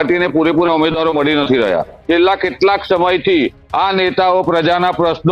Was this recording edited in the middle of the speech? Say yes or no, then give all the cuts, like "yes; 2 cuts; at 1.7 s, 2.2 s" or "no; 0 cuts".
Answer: yes; 1 cut; at 1.9 s